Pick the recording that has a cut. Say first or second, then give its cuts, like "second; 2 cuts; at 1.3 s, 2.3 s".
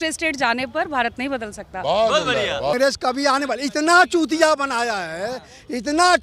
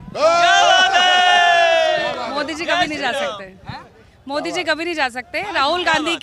first; 1 cut; at 2.7 s